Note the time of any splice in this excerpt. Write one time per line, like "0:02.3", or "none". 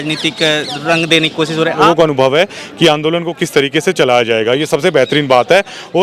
0:01.8